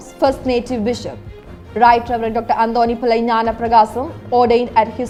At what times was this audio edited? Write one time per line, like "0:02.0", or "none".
none